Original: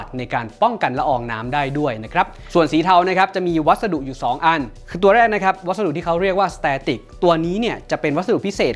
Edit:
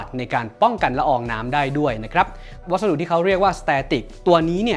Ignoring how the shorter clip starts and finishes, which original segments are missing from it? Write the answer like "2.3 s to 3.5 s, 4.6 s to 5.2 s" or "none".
2.6 s to 5.5 s